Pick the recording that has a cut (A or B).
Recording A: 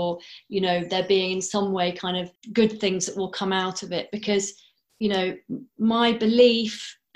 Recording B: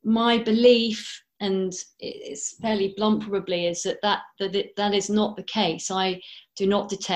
A